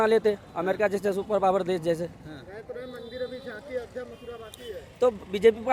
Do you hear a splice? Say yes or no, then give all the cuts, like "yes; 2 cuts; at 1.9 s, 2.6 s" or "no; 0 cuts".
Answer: no; 0 cuts